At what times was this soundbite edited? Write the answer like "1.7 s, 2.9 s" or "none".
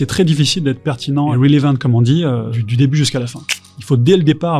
1.3 s, 2.5 s, 3.6 s